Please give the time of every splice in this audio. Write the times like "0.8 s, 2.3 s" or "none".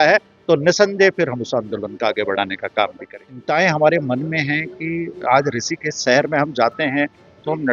3.3 s